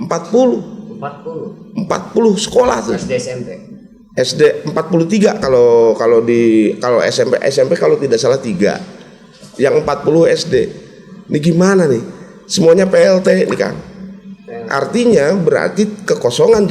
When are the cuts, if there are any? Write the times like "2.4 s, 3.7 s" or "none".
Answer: none

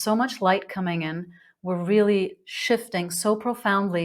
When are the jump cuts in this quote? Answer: none

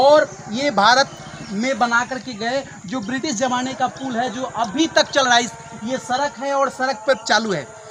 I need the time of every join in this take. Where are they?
none

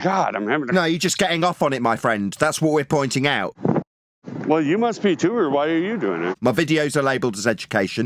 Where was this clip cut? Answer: 3.5 s, 6.3 s

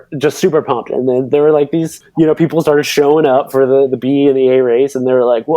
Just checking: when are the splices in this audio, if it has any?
2.0 s

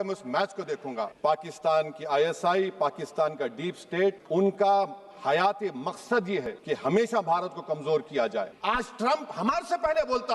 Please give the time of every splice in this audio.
1.1 s, 8.5 s

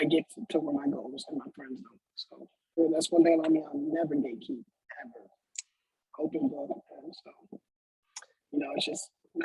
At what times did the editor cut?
2.8 s

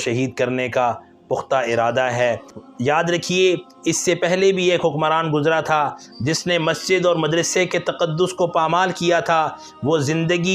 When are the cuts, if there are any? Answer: 2.5 s

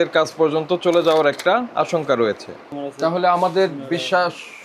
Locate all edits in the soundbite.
2.8 s

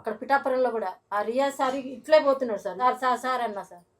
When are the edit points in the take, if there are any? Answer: 1.0 s, 2.7 s

